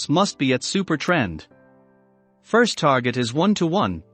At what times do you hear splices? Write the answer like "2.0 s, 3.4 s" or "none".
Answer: none